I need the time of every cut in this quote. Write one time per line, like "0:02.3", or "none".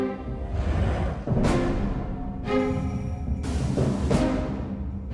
0:01.4